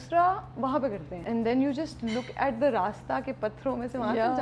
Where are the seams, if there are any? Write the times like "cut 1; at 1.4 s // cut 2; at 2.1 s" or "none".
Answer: cut 1; at 1.2 s